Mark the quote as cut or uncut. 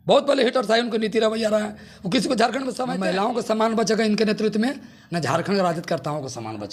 cut